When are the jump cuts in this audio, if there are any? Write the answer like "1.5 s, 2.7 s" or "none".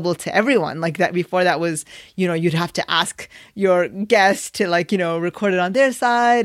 none